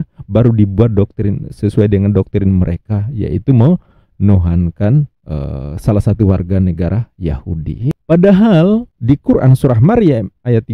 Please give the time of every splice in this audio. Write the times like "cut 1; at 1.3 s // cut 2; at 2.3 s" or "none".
cut 1; at 7.9 s